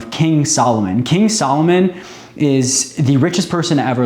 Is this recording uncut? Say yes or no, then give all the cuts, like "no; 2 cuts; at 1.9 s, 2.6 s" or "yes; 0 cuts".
yes; 0 cuts